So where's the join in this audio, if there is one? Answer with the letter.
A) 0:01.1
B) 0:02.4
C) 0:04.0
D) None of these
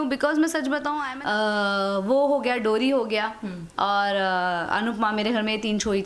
A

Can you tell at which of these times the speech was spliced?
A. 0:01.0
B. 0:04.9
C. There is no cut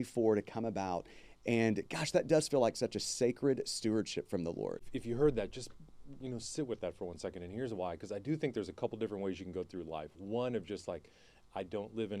B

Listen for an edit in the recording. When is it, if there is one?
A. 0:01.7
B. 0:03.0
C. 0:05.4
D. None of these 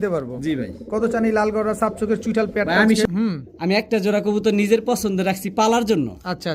B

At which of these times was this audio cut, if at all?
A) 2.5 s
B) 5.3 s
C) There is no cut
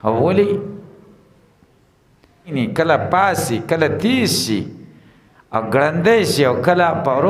A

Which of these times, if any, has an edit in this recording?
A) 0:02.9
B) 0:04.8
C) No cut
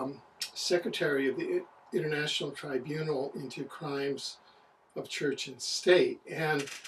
C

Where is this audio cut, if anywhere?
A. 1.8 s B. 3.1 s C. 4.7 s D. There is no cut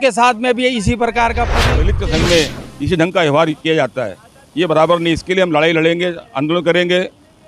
A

